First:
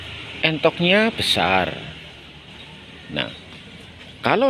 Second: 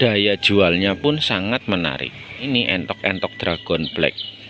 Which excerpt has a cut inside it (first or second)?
second